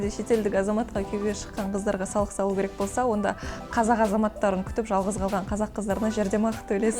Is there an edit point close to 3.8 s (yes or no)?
no